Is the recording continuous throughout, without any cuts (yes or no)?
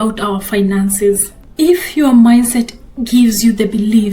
no